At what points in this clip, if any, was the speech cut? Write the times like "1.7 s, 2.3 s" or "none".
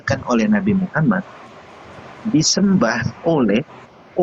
none